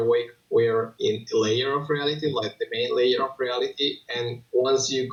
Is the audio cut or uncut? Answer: uncut